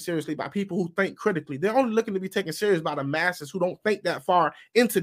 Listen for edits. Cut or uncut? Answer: uncut